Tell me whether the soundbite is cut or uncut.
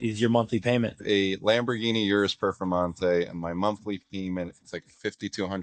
uncut